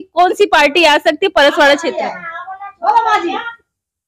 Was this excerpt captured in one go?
yes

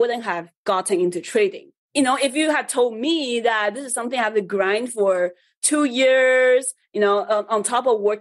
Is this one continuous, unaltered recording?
no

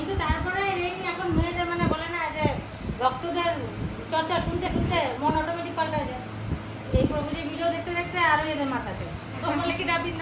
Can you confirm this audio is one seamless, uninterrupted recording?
yes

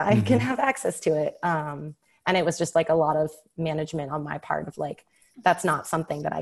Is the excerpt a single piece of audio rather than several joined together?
yes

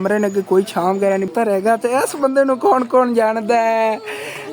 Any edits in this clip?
yes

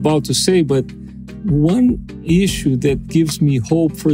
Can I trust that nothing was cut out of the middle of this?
no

